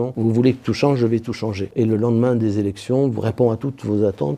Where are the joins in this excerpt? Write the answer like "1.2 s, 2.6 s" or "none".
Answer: 1.6 s